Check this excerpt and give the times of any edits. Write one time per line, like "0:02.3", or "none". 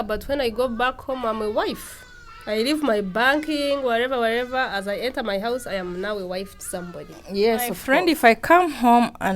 0:07.8